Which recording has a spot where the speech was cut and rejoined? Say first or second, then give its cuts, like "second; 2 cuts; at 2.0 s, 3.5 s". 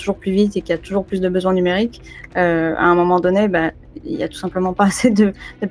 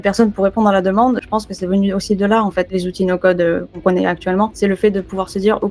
second; 4 cuts; at 1.2 s, 2.8 s, 3.8 s, 4.5 s